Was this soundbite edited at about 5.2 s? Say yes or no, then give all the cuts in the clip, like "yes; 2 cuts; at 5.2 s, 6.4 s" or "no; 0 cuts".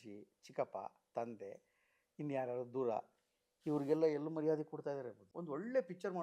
yes; 1 cut; at 5.2 s